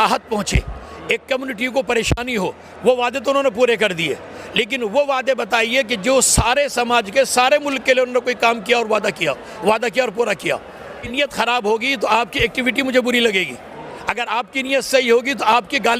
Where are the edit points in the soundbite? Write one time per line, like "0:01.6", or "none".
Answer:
0:11.0